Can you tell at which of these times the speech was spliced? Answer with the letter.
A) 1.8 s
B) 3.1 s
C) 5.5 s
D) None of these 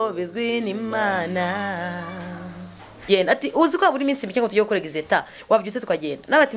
B